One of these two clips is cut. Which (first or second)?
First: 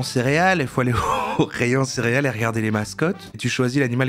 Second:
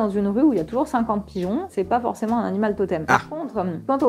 second